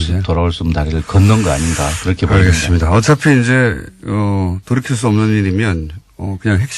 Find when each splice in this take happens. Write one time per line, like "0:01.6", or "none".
0:03.1